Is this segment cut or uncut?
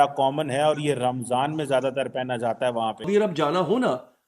cut